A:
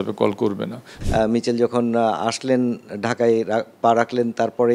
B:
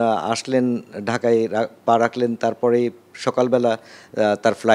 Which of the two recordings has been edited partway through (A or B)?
A